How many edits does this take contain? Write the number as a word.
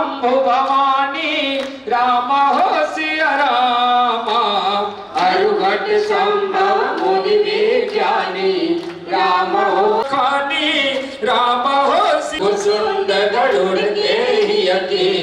zero